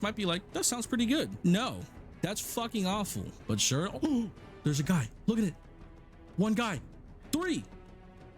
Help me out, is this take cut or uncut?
cut